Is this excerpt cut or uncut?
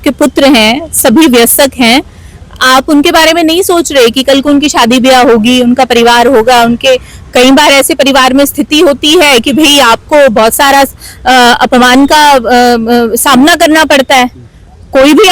uncut